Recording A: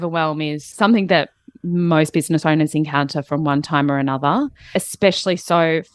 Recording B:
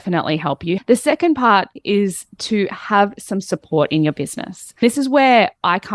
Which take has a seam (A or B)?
B